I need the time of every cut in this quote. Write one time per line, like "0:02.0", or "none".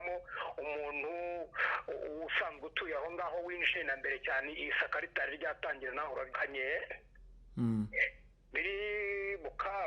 0:06.3